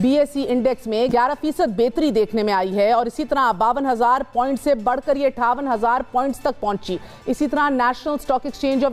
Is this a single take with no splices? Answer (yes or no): no